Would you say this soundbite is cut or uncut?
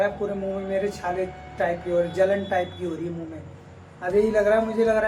uncut